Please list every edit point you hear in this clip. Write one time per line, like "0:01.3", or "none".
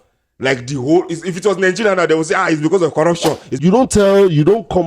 0:03.5